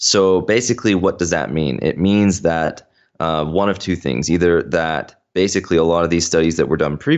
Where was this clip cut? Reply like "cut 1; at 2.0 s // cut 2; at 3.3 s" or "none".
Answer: none